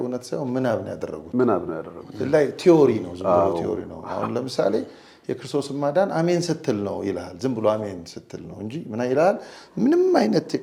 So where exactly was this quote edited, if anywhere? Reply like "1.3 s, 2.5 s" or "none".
none